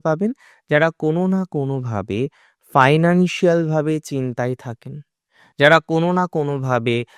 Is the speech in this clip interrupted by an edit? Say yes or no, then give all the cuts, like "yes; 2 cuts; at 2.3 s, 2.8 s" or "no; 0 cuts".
no; 0 cuts